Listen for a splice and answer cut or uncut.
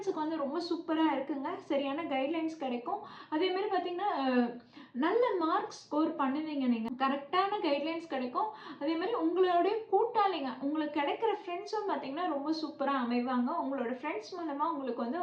uncut